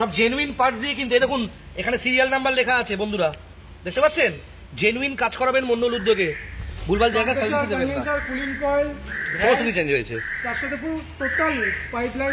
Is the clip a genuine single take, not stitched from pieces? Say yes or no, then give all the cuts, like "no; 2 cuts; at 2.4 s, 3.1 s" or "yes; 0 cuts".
yes; 0 cuts